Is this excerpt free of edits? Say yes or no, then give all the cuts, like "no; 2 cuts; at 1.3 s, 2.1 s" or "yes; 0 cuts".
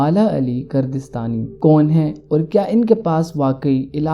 no; 1 cut; at 1.5 s